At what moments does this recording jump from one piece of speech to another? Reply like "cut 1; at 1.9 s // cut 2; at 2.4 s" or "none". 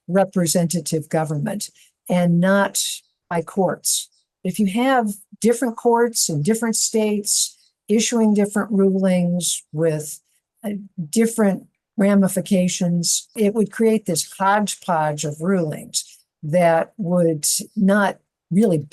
cut 1; at 13.3 s